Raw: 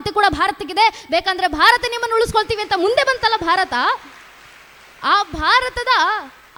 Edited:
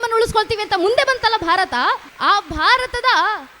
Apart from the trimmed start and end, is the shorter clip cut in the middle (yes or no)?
yes